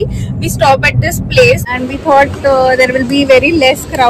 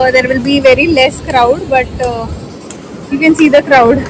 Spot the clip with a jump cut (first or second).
first